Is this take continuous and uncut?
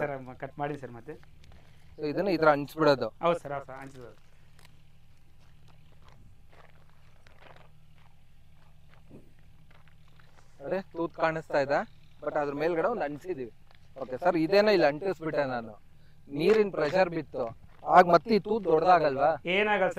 yes; 0 cuts

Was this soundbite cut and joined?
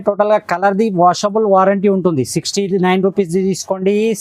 no; 0 cuts

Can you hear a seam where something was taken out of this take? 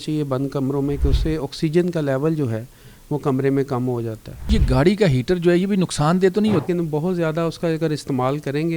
yes; 2 cuts; at 4.4 s, 6.6 s

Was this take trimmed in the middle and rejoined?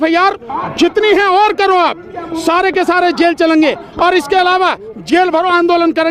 no; 0 cuts

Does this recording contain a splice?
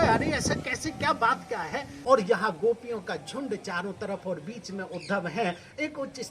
yes; 1 cut; at 1.9 s

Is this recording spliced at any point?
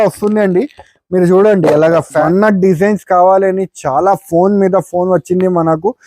yes; 1 cut; at 2.2 s

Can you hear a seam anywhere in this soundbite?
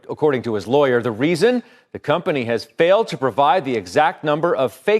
no; 0 cuts

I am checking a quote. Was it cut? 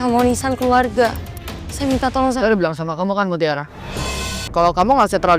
yes; 1 cut; at 4.4 s

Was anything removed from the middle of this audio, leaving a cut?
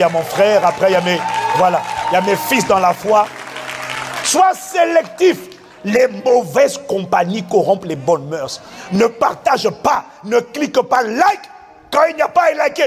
no; 0 cuts

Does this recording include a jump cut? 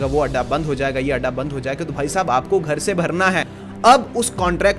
yes; 1 cut; at 3.5 s

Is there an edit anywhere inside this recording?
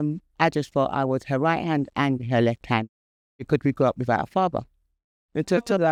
no; 0 cuts

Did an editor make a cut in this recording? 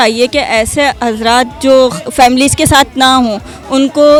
no; 0 cuts

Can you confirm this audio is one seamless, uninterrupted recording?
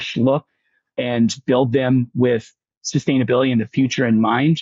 no; 1 cut; at 0.9 s

